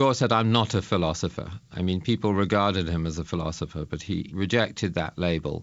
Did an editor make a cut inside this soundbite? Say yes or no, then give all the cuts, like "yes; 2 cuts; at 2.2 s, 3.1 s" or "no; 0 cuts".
yes; 2 cuts; at 1.6 s, 4.1 s